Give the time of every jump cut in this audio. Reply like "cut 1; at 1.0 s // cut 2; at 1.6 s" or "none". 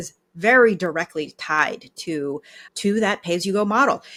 none

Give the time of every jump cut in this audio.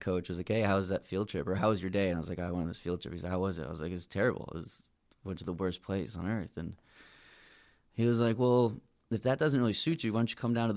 none

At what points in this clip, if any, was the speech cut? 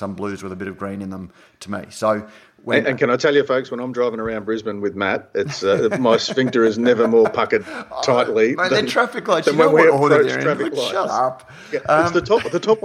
none

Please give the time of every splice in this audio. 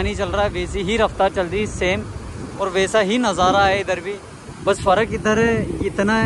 none

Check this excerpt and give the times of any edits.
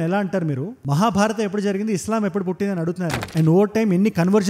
cut 1; at 3.2 s

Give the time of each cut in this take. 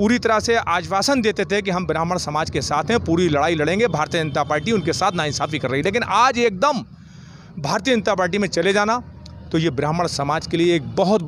none

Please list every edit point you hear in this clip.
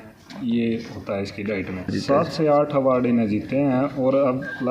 cut 1; at 1.9 s

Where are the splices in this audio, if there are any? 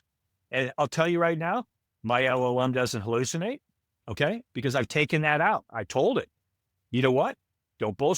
cut 1; at 4.4 s

